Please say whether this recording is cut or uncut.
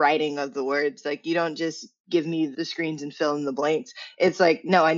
uncut